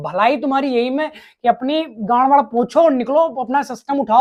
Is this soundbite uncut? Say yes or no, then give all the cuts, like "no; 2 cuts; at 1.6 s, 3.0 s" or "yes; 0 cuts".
yes; 0 cuts